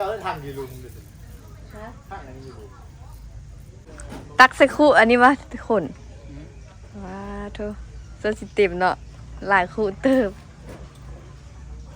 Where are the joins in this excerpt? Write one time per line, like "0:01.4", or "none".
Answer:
0:03.9